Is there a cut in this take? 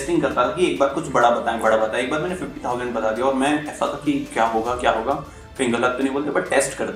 no; 0 cuts

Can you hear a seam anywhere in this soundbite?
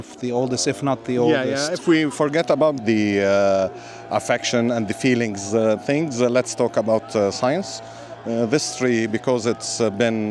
yes; 1 cut; at 2.8 s

